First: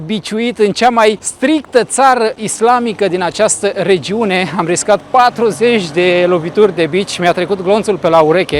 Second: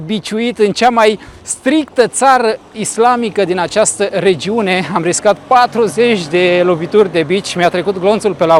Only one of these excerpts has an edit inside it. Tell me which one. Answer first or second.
first